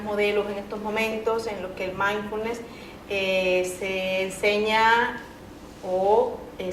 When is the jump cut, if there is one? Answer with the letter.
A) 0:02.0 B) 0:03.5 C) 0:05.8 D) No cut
D